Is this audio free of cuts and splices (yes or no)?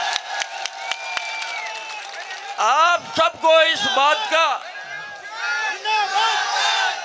yes